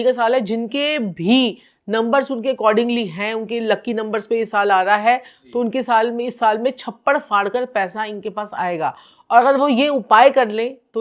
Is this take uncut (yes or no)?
yes